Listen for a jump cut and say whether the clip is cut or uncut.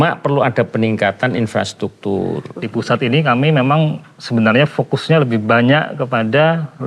cut